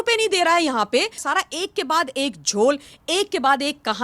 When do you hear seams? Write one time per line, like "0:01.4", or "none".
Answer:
0:01.2